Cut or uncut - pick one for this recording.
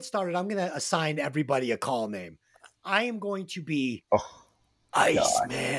uncut